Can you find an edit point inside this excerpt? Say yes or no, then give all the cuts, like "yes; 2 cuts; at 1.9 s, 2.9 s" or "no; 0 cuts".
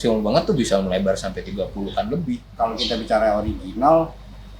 yes; 1 cut; at 2.5 s